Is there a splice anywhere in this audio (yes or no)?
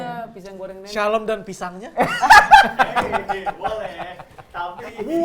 no